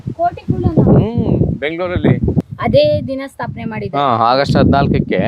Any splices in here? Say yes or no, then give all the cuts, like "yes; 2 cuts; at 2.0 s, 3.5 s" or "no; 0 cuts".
yes; 1 cut; at 2.5 s